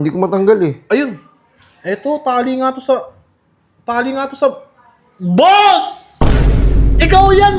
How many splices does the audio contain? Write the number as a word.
zero